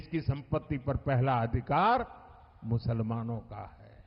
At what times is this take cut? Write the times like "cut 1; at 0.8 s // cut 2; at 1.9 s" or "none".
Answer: none

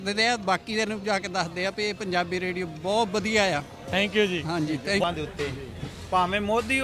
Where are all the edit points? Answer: cut 1; at 5.0 s

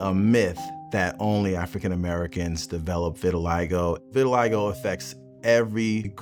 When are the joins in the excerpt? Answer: none

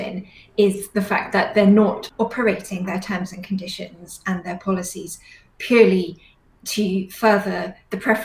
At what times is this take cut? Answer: cut 1; at 2.1 s

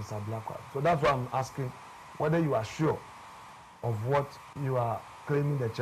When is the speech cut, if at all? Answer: cut 1; at 4.4 s

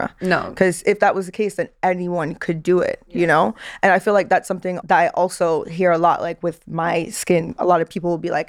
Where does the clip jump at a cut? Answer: cut 1; at 4.8 s

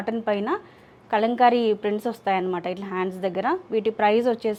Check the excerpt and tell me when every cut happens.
none

